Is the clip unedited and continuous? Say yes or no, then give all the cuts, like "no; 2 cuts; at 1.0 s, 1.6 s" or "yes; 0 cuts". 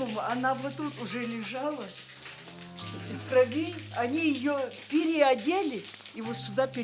yes; 0 cuts